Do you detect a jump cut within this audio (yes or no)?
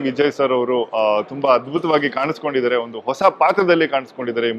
no